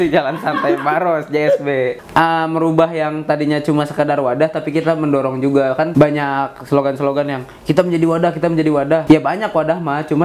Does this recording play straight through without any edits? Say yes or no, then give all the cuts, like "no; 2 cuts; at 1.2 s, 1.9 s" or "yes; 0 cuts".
no; 3 cuts; at 2.0 s, 5.9 s, 9.0 s